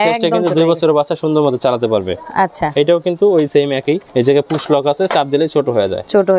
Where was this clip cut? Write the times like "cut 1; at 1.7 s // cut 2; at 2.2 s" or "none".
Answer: cut 1; at 4.1 s